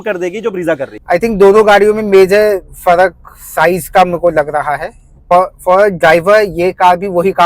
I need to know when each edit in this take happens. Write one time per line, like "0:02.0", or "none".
0:00.9
0:05.3